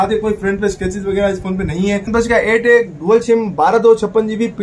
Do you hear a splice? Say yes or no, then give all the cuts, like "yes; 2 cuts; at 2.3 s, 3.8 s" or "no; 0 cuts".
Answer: yes; 1 cut; at 2.1 s